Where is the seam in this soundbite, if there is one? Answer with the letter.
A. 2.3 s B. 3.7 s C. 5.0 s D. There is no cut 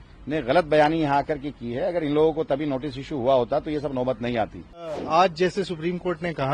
C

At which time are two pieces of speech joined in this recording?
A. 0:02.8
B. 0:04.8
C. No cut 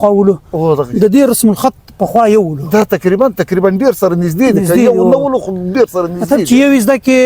C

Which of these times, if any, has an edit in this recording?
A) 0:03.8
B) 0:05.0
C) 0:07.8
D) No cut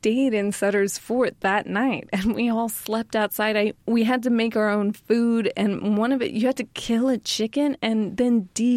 A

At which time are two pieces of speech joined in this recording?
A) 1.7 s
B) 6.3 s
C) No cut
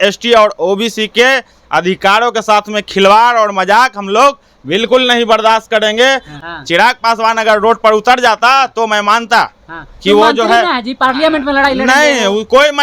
B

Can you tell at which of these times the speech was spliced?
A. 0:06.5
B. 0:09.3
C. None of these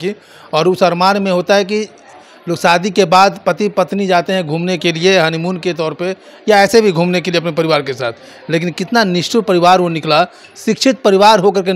C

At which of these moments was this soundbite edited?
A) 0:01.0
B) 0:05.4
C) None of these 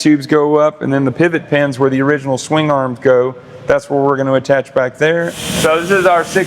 B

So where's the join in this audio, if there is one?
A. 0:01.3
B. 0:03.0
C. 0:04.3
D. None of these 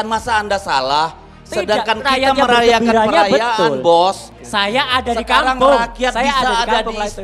C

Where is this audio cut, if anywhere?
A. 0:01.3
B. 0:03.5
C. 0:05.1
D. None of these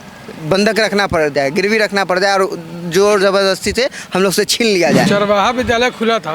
C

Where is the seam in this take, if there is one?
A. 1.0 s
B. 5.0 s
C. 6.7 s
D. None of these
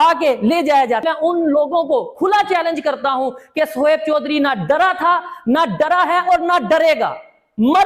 A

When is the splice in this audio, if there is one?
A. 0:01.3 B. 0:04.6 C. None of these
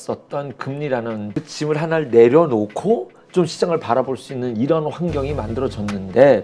A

